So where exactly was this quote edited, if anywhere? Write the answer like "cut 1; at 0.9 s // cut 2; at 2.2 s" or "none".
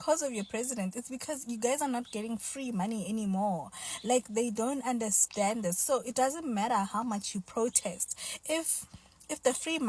none

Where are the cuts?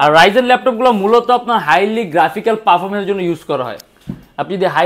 none

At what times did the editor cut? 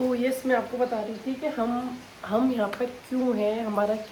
none

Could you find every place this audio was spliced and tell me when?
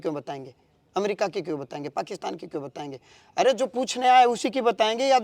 none

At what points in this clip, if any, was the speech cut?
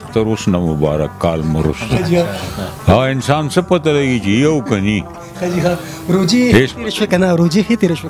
none

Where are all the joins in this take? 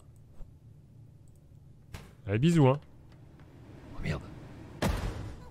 cut 1; at 4.5 s

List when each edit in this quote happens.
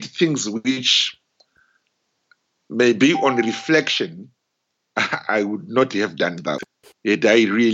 cut 1; at 6.6 s

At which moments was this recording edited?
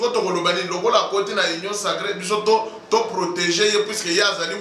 none

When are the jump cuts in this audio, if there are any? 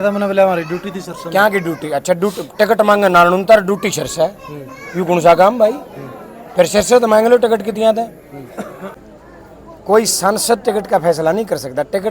cut 1; at 9.0 s

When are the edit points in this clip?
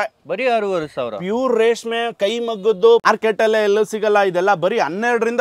cut 1; at 3.0 s

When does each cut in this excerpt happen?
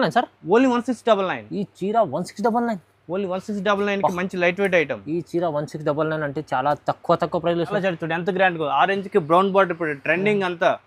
cut 1; at 7.8 s

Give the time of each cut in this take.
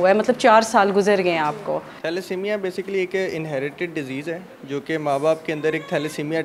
cut 1; at 1.9 s

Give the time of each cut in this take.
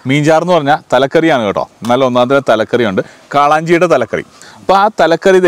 cut 1; at 4.4 s

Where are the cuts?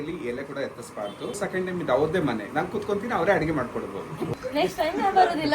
cut 1; at 1.4 s // cut 2; at 4.3 s

